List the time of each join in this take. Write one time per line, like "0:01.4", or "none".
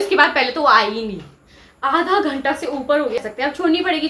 0:03.2